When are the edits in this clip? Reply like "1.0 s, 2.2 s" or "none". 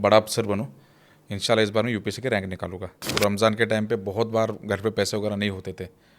3.2 s